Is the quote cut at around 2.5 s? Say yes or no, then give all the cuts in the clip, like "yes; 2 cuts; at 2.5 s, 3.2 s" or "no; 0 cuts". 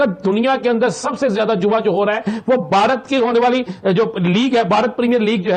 no; 0 cuts